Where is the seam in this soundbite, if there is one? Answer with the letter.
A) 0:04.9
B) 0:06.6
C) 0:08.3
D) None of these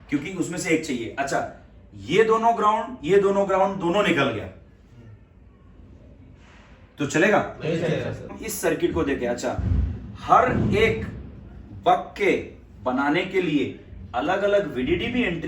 C